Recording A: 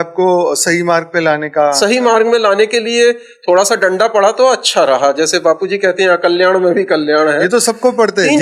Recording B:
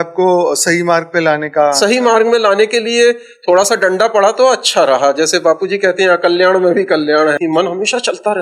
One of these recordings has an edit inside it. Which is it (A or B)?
B